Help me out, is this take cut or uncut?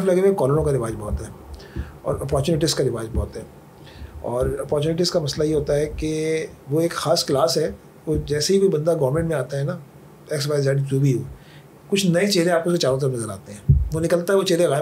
uncut